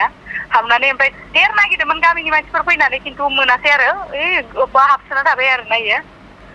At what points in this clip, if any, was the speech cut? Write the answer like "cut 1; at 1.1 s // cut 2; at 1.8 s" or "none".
none